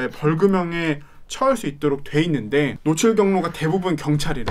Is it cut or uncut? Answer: cut